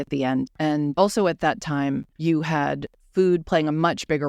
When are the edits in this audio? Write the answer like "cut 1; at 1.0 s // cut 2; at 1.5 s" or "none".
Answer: cut 1; at 0.7 s // cut 2; at 2.1 s // cut 3; at 2.9 s